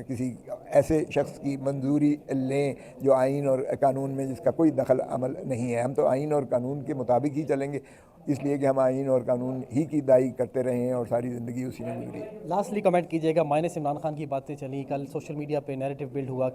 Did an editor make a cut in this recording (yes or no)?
no